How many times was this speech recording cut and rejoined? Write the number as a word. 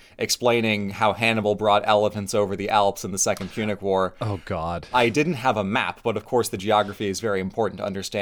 one